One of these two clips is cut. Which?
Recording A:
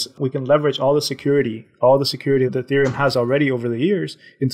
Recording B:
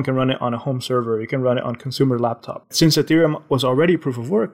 B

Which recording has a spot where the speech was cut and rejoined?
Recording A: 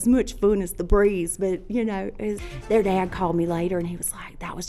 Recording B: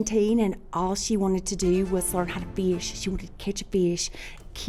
A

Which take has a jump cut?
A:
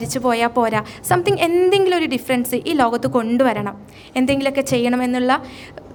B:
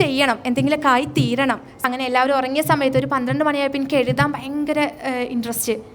B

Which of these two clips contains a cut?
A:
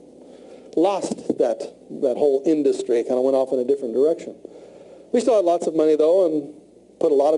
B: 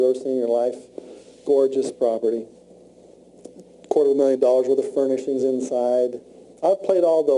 B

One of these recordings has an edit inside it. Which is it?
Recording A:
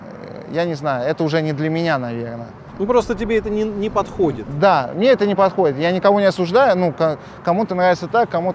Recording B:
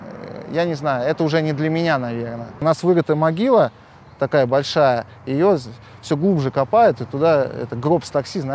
B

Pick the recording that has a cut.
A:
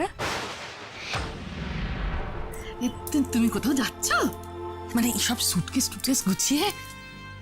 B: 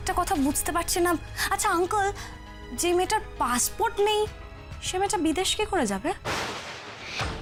A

